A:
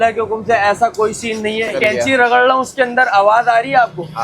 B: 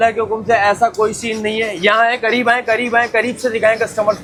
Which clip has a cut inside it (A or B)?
A